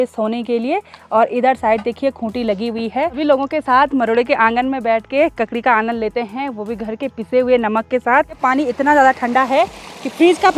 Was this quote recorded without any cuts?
no; 2 cuts; at 3.2 s, 8.4 s

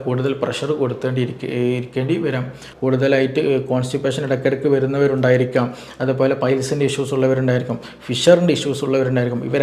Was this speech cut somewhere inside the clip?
yes; 1 cut; at 2.7 s

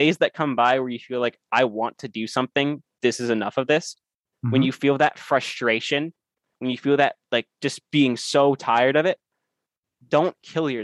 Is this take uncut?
yes; 0 cuts

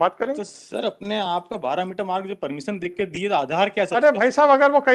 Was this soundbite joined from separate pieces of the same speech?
no; 0 cuts

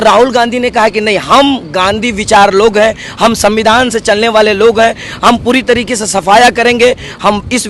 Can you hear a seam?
no; 0 cuts

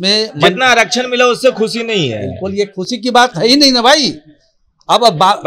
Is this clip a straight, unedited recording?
yes; 0 cuts

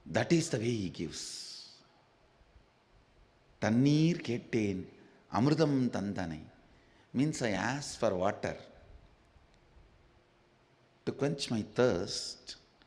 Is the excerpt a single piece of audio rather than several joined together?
yes; 0 cuts

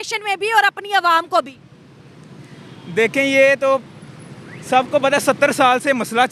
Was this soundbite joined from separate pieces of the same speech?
no; 0 cuts

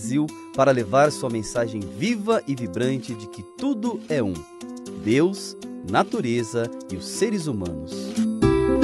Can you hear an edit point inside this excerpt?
no; 0 cuts

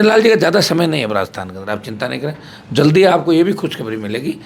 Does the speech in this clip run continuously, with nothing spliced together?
yes; 0 cuts

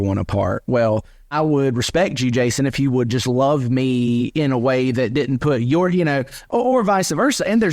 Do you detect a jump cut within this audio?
yes; 1 cut; at 1.3 s

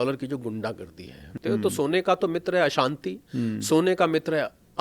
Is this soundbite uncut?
no; 1 cut; at 1.3 s

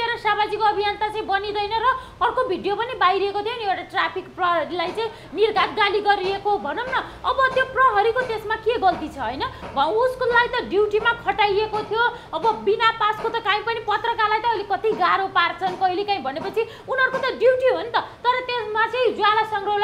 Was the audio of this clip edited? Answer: no; 0 cuts

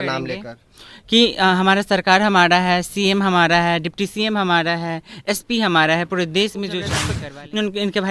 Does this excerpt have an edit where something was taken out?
yes; 1 cut; at 7.0 s

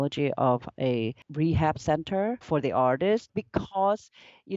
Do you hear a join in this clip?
yes; 3 cuts; at 1.2 s, 2.4 s, 3.3 s

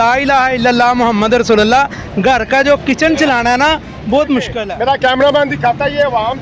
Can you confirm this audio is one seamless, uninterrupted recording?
no; 1 cut; at 4.6 s

